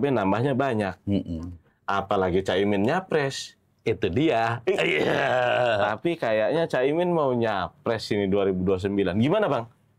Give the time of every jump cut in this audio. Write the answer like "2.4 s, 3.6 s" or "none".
none